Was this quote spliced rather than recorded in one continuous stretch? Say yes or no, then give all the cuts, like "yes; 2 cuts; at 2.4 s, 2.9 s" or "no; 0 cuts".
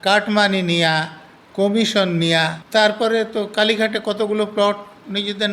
yes; 1 cut; at 2.6 s